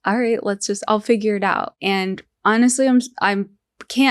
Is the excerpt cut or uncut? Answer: cut